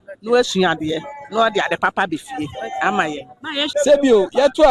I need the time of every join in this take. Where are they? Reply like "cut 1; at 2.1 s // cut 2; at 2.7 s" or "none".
cut 1; at 3.6 s